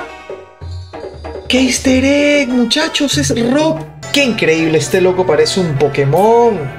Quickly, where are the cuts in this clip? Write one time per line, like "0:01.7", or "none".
0:03.9

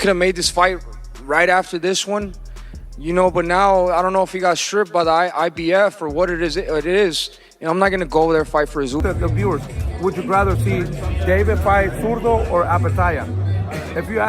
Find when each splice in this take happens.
0:09.0

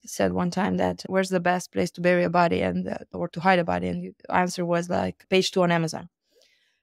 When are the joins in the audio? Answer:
0:01.0

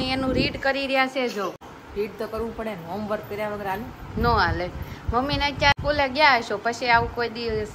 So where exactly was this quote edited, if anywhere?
0:01.7
0:05.8

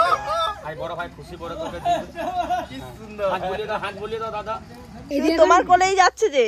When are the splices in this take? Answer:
0:04.9

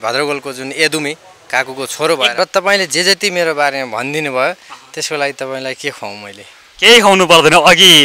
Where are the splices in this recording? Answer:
0:02.3

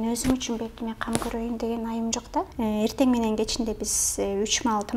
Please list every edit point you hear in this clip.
0:02.5

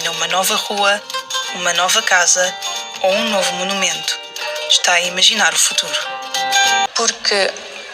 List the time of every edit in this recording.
0:06.9

